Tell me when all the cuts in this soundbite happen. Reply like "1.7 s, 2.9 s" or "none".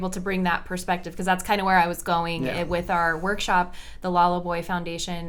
none